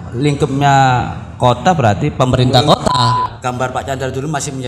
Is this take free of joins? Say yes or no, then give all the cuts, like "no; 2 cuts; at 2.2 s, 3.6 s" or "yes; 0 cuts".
no; 1 cut; at 3.3 s